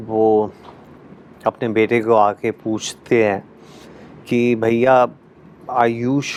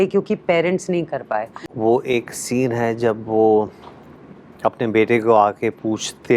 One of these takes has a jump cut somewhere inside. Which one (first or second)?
second